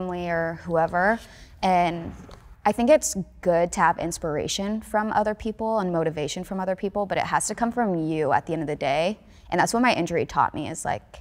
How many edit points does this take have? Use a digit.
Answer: 0